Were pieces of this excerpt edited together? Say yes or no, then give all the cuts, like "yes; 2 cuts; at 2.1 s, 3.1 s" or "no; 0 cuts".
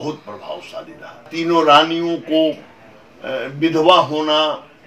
yes; 1 cut; at 1.3 s